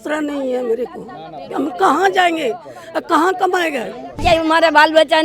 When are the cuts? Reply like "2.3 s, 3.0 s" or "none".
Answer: 4.2 s